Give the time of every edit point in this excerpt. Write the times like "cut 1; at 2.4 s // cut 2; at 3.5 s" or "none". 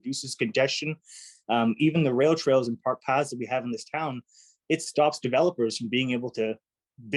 none

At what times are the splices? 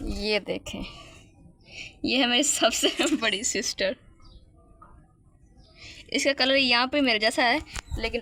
none

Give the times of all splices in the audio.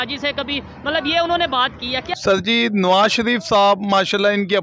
cut 1; at 2.1 s

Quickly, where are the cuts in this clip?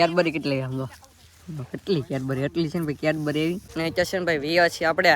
cut 1; at 3.7 s

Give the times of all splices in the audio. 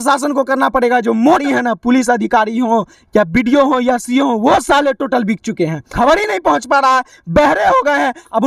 cut 1; at 1.4 s // cut 2; at 5.9 s

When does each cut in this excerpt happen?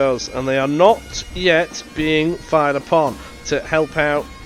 cut 1; at 3.3 s

